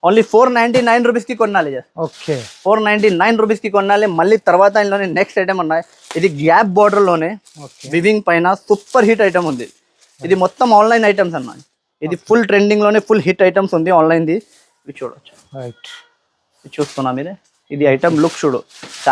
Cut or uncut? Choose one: uncut